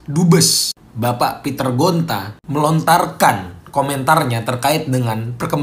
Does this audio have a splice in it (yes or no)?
no